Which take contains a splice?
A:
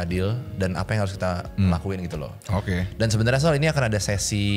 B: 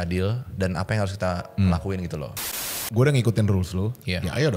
B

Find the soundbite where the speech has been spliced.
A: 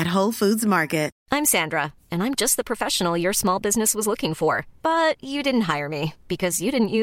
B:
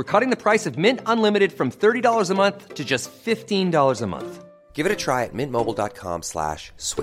A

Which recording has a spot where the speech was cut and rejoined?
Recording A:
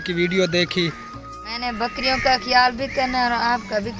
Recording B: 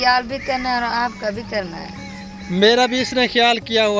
A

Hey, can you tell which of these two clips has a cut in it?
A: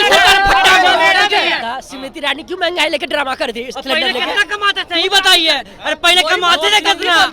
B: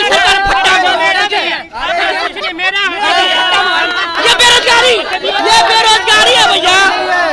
A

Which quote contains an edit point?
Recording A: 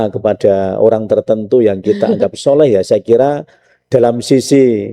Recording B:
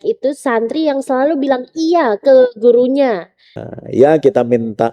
B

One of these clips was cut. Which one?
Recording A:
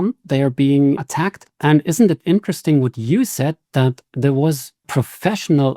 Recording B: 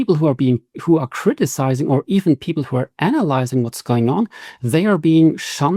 A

